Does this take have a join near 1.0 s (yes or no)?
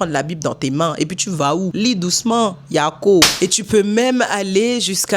no